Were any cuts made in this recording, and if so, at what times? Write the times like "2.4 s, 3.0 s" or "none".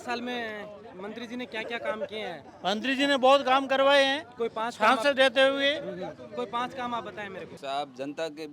7.5 s